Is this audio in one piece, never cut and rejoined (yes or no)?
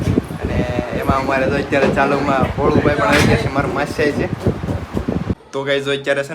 no